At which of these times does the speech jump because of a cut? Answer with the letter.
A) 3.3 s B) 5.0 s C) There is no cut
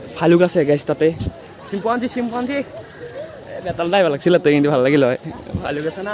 C